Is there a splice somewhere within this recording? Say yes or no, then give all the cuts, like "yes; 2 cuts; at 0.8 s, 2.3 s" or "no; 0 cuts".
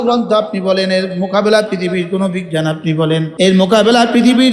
yes; 1 cut; at 3.3 s